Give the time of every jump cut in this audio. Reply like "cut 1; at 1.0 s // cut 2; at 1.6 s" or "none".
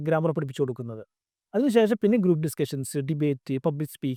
none